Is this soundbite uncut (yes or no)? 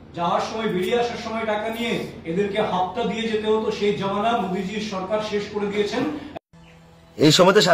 no